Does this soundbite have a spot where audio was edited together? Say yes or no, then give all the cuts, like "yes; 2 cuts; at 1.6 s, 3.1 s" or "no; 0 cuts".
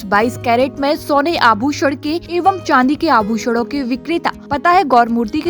yes; 2 cuts; at 2.2 s, 4.4 s